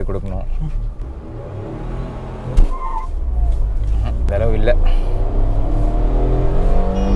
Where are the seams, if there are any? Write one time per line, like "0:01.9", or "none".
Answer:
0:01.0
0:04.3